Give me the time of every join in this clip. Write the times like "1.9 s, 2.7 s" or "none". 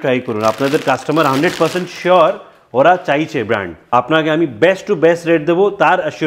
3.7 s